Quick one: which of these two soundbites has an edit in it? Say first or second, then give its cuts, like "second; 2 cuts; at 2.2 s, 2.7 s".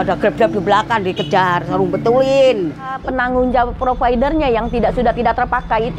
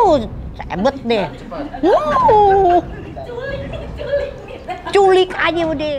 first; 1 cut; at 3.0 s